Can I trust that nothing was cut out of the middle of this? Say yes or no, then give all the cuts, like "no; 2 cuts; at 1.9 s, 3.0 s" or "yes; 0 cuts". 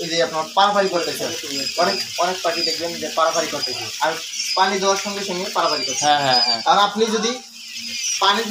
yes; 0 cuts